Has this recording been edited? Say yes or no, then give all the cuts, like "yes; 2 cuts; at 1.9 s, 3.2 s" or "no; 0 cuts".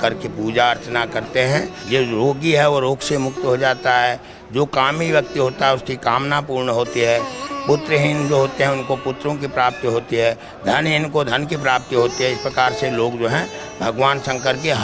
yes; 1 cut; at 1.8 s